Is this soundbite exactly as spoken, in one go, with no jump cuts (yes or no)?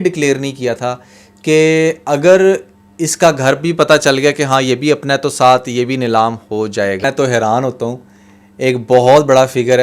no